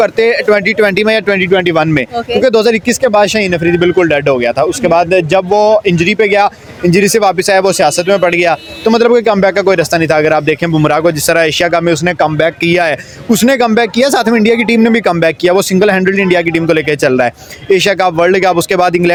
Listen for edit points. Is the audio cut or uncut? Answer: uncut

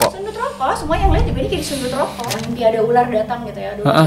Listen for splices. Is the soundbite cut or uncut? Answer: cut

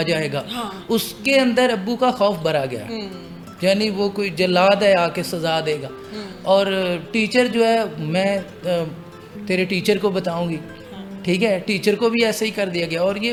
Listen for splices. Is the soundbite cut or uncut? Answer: uncut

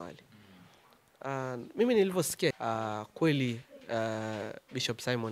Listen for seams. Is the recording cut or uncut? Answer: cut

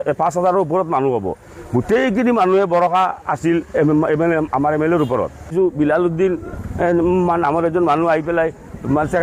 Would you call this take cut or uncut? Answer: cut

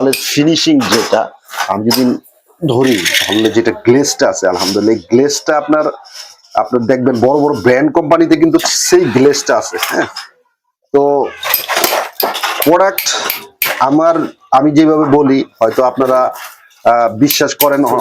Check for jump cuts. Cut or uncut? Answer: uncut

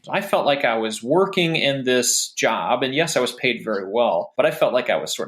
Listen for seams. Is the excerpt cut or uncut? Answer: cut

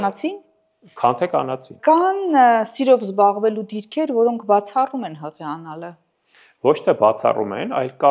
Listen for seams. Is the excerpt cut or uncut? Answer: cut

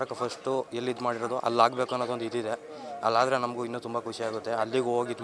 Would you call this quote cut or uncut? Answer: uncut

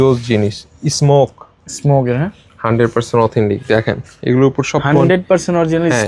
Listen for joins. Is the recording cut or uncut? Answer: uncut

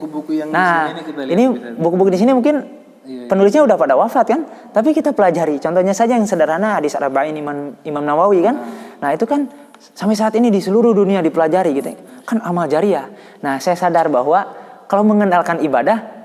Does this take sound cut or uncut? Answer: uncut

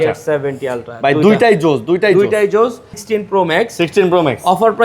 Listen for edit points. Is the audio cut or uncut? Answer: cut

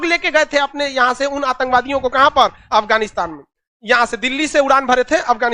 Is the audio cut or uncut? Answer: uncut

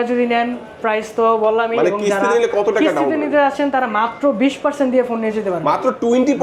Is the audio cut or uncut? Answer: uncut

